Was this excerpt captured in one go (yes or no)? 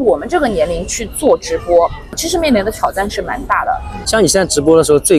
no